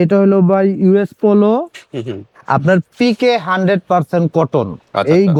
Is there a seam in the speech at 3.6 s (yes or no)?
no